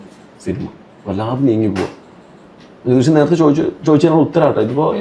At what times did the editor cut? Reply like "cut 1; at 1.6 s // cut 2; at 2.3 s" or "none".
none

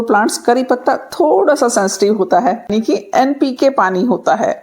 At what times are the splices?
cut 1; at 2.7 s

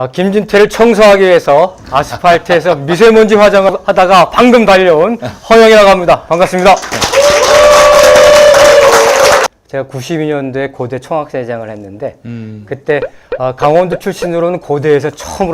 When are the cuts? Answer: cut 1; at 3.7 s // cut 2; at 9.4 s

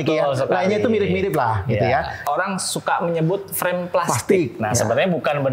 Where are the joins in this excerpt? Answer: cut 1; at 2.2 s

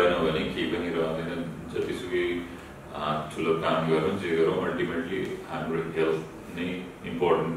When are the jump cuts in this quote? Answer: none

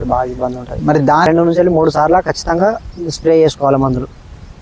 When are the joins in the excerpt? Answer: cut 1; at 1.3 s

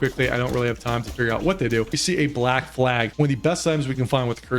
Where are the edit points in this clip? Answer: cut 1; at 2.0 s // cut 2; at 3.1 s

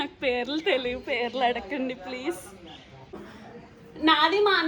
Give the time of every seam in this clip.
cut 1; at 3.2 s

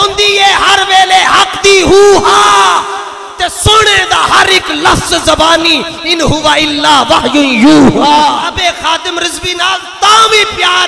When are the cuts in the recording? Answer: cut 1; at 8.4 s

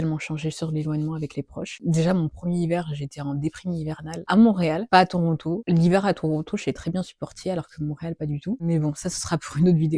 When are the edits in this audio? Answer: none

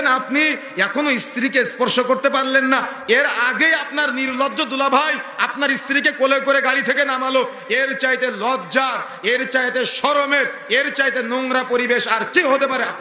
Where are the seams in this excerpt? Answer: none

